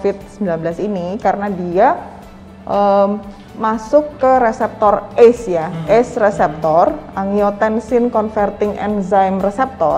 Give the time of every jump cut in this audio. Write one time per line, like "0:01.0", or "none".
none